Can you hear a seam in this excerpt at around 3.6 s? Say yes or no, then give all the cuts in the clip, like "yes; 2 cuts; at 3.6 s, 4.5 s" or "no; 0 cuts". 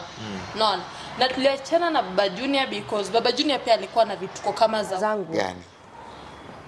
no; 1 cut; at 5.0 s